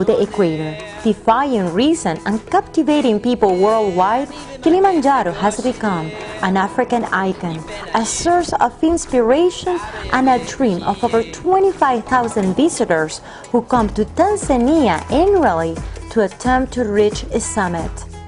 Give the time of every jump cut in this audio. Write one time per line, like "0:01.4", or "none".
0:15.0